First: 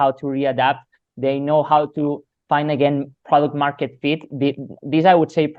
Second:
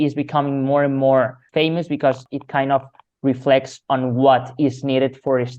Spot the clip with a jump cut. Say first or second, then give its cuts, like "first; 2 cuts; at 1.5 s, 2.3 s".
second; 2 cuts; at 1.4 s, 2.3 s